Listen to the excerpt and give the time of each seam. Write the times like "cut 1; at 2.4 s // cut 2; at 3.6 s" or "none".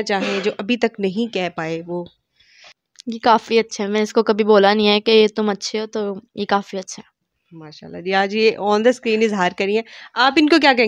none